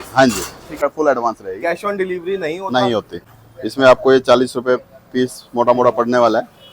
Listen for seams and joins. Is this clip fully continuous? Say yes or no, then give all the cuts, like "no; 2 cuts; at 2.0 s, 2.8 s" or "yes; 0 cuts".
no; 2 cuts; at 0.8 s, 3.2 s